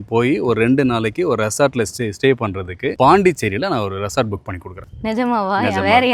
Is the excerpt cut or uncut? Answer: uncut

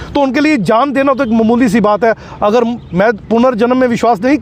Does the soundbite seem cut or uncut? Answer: uncut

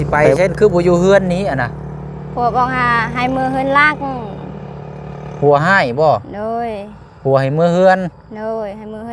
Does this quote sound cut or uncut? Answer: uncut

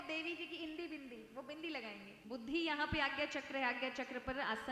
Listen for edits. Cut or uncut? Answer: cut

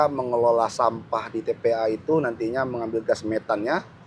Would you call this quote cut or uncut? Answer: uncut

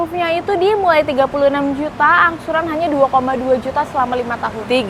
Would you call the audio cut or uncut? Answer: uncut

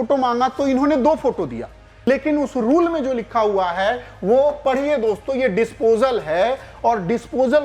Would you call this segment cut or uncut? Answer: cut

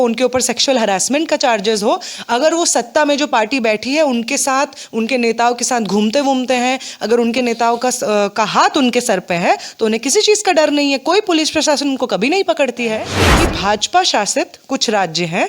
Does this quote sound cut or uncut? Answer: cut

